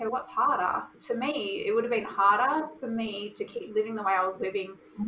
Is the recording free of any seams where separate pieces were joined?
no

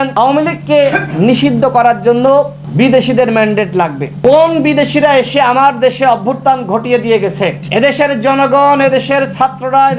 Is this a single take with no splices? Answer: yes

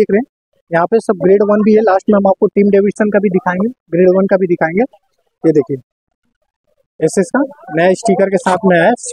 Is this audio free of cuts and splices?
yes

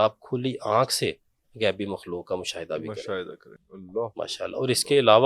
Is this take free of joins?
yes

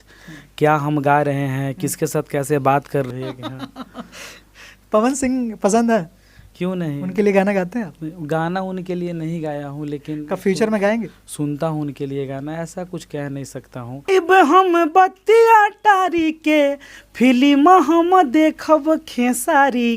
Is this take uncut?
no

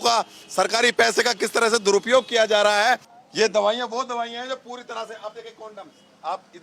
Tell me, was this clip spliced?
yes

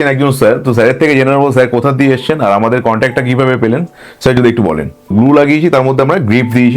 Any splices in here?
yes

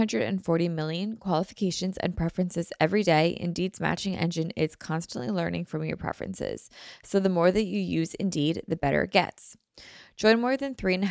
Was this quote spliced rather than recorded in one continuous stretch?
no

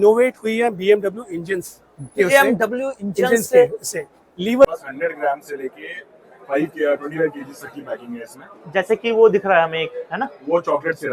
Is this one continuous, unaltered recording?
no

